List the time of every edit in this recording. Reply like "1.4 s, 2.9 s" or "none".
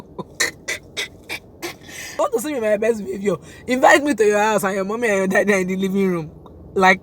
2.2 s